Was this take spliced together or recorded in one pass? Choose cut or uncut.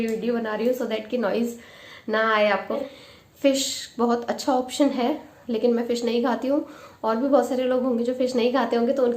cut